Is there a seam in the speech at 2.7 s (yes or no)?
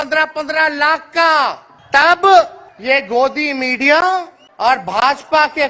yes